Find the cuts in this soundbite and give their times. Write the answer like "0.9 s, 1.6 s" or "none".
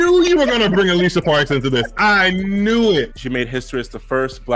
3.2 s